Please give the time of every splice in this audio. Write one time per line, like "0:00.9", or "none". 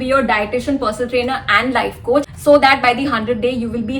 0:02.3